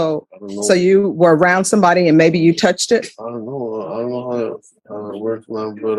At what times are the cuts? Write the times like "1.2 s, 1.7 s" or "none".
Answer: none